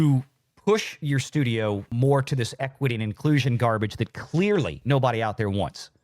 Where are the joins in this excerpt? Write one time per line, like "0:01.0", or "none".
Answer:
0:01.9
0:04.8

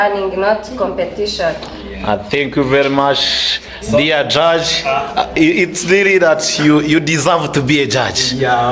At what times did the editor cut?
none

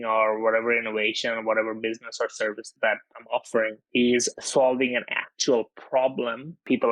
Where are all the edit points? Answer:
0:02.7

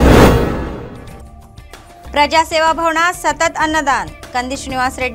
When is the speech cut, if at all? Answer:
0:02.1

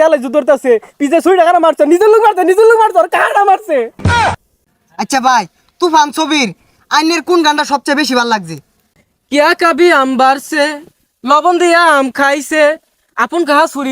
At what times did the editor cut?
0:04.3
0:08.8

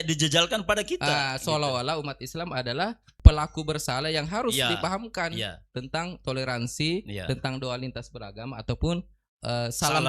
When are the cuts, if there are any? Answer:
0:03.1

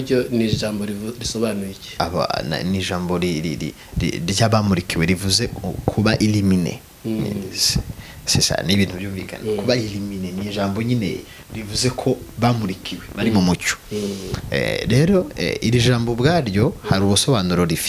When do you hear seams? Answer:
none

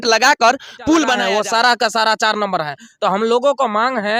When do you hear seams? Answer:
0:01.2

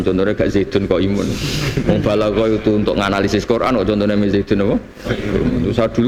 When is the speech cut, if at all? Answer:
none

